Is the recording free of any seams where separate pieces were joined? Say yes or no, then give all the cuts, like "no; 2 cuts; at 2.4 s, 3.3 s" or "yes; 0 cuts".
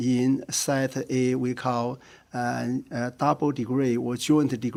yes; 0 cuts